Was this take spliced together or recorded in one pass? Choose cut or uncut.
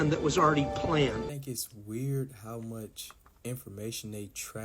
cut